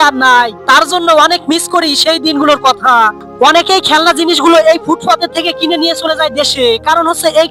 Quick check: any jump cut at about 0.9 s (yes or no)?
no